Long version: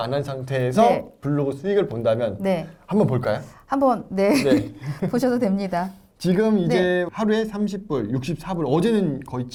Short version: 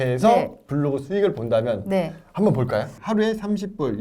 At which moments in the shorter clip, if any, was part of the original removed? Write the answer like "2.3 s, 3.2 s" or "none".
3.0 s